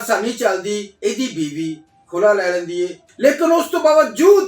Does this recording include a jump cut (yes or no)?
yes